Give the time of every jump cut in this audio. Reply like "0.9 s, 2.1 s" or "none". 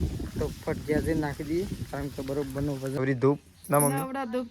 3.0 s